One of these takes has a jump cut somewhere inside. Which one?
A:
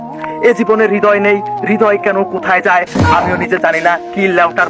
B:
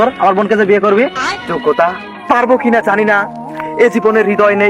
B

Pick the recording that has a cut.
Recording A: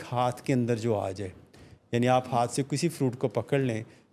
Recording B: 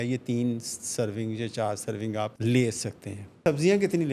B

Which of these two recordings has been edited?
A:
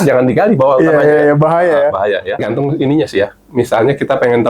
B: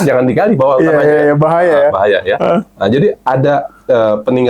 A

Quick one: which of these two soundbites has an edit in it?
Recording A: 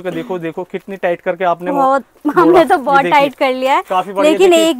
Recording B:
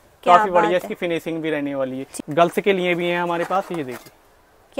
B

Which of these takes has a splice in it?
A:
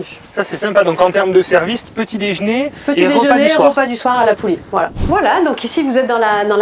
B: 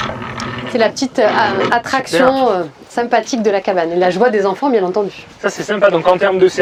A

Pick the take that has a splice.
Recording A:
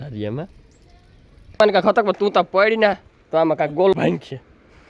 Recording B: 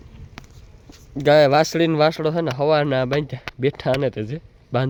A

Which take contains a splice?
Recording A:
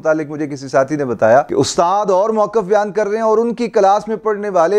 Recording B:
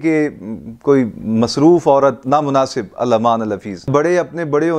B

